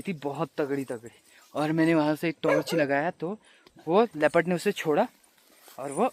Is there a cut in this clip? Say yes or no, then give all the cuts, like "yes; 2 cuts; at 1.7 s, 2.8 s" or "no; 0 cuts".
no; 0 cuts